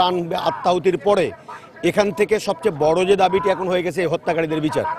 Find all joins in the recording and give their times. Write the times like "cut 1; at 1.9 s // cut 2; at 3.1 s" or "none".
none

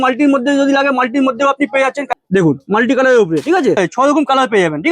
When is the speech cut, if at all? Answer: cut 1; at 2.0 s // cut 2; at 3.8 s

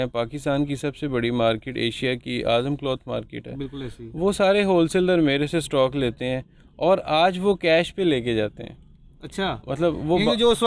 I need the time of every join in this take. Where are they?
none

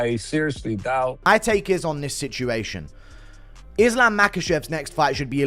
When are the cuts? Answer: cut 1; at 1.3 s

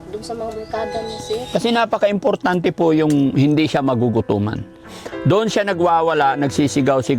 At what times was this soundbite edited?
cut 1; at 1.5 s

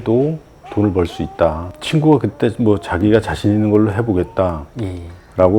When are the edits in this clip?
cut 1; at 1.7 s

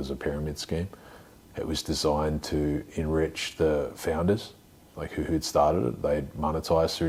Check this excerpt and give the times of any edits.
none

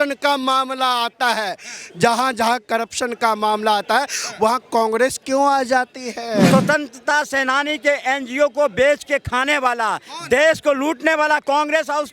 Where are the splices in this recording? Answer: cut 1; at 6.5 s

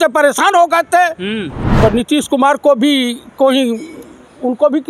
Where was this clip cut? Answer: cut 1; at 1.6 s

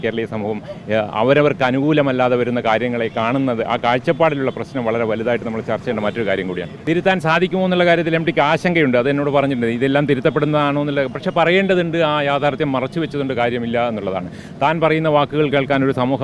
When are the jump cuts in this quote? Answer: cut 1; at 6.7 s

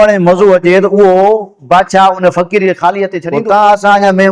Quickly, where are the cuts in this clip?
cut 1; at 3.2 s

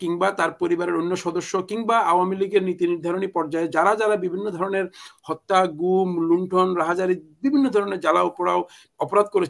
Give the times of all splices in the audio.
none

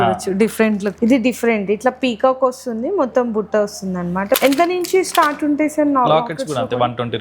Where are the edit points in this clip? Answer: cut 1; at 0.9 s // cut 2; at 4.4 s

